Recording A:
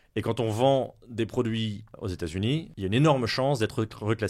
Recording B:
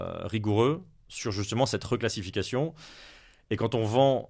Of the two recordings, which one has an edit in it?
A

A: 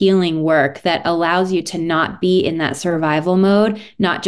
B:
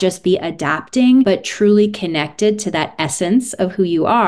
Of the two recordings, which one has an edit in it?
B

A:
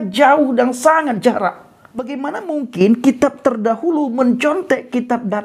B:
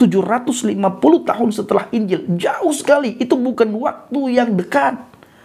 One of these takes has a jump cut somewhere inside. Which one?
A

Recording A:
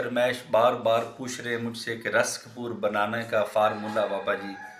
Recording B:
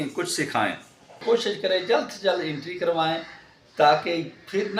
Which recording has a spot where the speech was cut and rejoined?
B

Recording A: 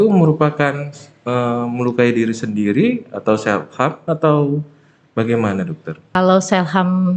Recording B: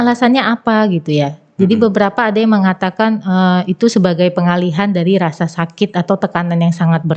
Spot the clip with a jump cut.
A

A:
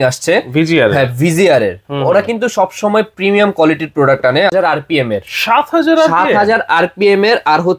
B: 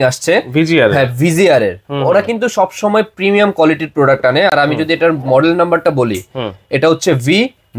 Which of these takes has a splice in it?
A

